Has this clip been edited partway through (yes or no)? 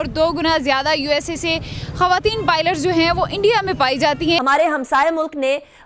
yes